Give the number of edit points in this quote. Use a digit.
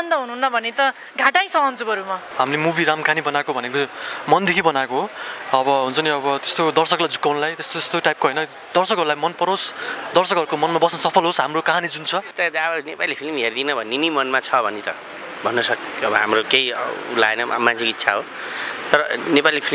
2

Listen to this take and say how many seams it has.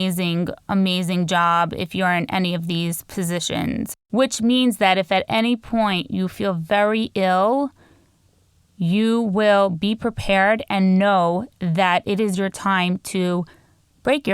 1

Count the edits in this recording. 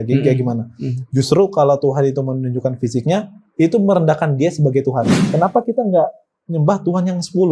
1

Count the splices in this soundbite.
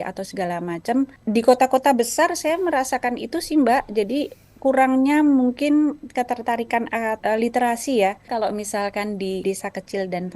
4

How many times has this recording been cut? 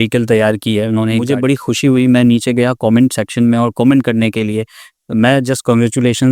1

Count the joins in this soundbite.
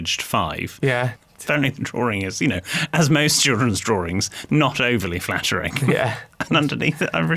1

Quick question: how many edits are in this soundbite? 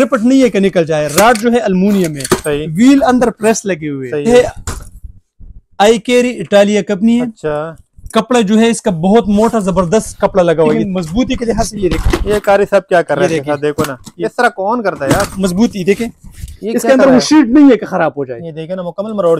3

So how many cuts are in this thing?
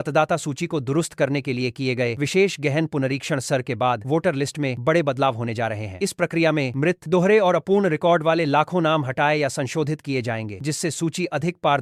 0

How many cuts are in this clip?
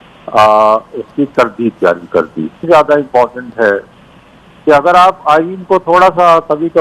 1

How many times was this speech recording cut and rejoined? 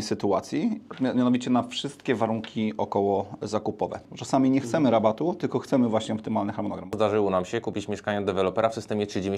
2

